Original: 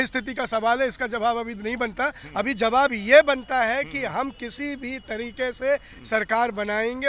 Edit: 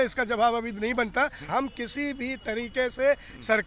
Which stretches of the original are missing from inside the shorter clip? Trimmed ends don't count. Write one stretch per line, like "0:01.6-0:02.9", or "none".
0:02.2-0:04.0